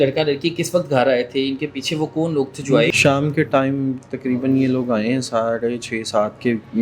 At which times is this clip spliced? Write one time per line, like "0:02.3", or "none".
0:02.9